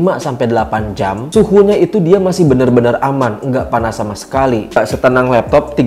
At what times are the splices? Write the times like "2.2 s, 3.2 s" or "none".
4.8 s